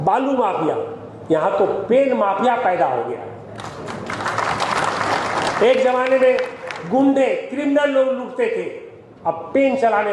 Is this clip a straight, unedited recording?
yes; 0 cuts

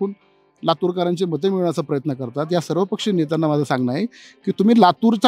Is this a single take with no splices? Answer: yes; 0 cuts

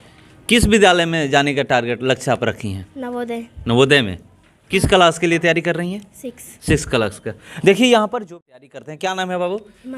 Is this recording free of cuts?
no; 1 cut; at 8.2 s

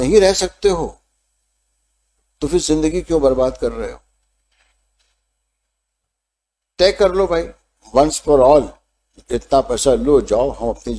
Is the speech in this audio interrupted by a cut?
no; 0 cuts

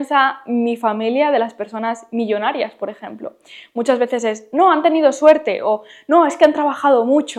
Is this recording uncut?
yes; 0 cuts

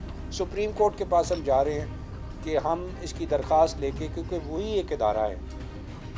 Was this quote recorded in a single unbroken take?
yes; 0 cuts

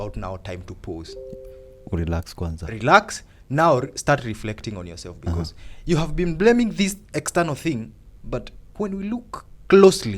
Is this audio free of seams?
no; 1 cut; at 8.6 s

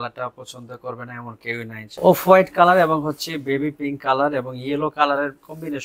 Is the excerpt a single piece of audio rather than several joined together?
no; 1 cut; at 1.8 s

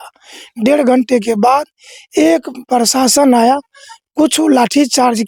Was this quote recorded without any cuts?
yes; 0 cuts

